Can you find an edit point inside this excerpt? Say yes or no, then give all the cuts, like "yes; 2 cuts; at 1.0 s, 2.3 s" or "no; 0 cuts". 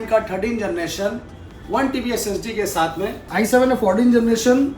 yes; 1 cut; at 3.2 s